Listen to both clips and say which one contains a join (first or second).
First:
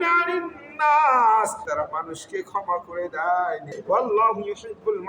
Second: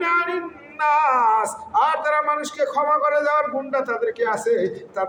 first